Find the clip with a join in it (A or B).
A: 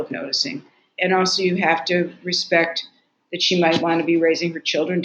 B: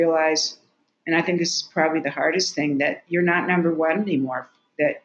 A